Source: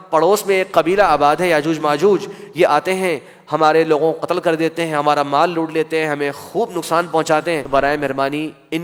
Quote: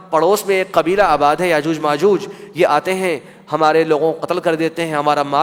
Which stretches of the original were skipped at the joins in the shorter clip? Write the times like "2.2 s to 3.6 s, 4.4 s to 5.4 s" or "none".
none